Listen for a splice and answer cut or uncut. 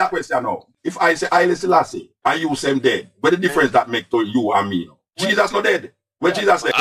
uncut